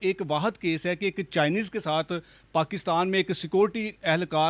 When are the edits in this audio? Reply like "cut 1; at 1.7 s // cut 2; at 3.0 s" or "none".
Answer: none